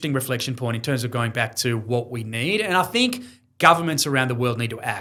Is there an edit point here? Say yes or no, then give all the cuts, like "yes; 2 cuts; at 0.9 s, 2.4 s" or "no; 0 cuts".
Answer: no; 0 cuts